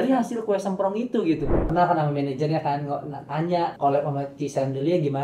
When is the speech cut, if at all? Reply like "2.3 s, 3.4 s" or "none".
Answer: 1.6 s, 3.7 s